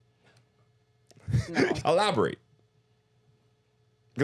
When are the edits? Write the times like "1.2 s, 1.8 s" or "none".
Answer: 1.8 s